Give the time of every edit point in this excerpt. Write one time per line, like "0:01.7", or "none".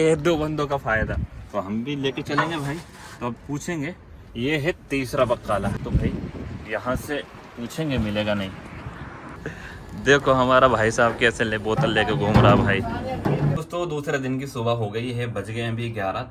none